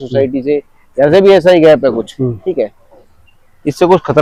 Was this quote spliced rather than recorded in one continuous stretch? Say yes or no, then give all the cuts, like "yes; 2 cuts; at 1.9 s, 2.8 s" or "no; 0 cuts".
no; 0 cuts